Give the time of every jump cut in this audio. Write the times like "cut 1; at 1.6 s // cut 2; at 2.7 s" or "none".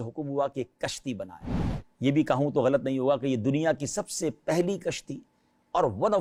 none

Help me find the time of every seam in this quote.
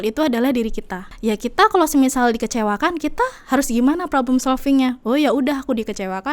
cut 1; at 1.1 s

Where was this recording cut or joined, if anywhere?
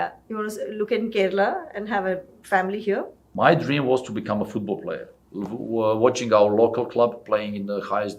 cut 1; at 3.2 s

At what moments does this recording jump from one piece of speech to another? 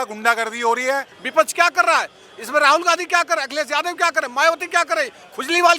cut 1; at 1.2 s

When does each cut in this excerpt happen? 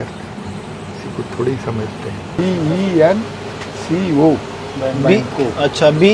cut 1; at 2.4 s

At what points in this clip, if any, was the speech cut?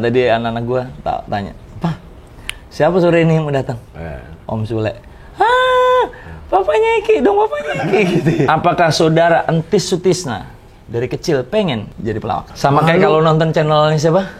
cut 1; at 0.9 s // cut 2; at 8.5 s // cut 3; at 12.5 s

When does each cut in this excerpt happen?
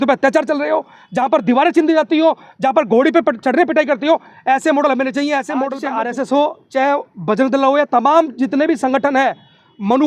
cut 1; at 5.8 s

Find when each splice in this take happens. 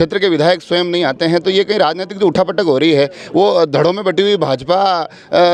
none

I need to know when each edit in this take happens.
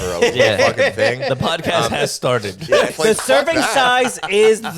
cut 1; at 2.9 s

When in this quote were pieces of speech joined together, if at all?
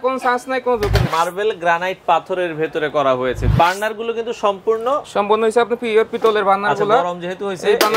cut 1; at 1.1 s // cut 2; at 3.5 s

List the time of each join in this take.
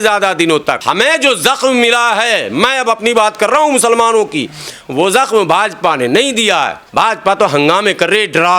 cut 1; at 0.8 s // cut 2; at 6.8 s

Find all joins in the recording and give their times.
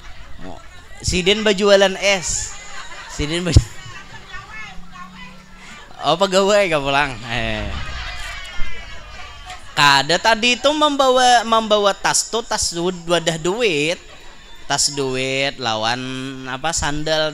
none

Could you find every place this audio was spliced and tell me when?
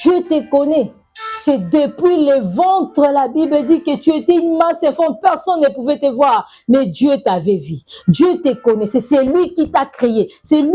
none

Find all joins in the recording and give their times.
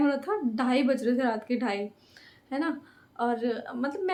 none

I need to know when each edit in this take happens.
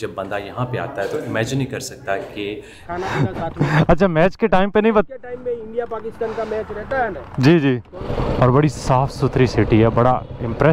cut 1; at 2.8 s // cut 2; at 8.0 s

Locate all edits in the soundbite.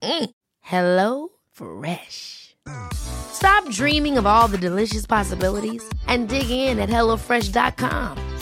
none

